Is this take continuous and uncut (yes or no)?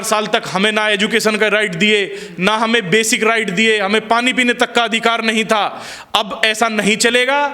yes